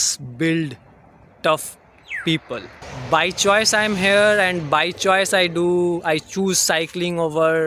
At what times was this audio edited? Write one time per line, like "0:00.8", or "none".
none